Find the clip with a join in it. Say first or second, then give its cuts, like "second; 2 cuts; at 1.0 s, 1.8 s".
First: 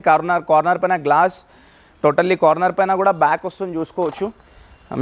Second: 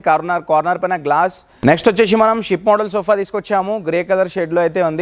second; 1 cut; at 1.5 s